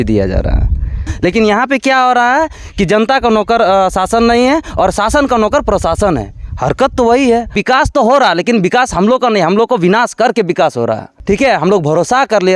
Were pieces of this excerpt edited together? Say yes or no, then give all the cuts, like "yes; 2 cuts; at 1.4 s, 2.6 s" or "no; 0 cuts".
yes; 3 cuts; at 1.1 s, 7.6 s, 11.1 s